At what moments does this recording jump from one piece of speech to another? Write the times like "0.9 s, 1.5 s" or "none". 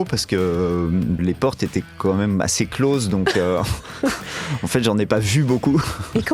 1.2 s

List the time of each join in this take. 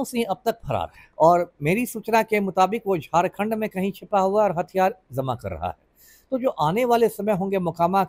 1.0 s

